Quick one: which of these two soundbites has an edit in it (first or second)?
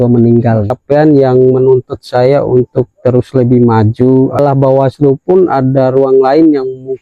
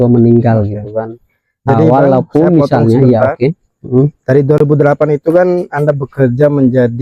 first